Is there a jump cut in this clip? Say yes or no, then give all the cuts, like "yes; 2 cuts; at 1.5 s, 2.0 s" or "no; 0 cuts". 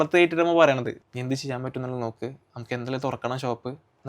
yes; 1 cut; at 0.9 s